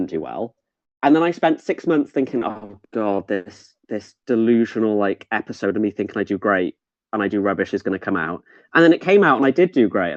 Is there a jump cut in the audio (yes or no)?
no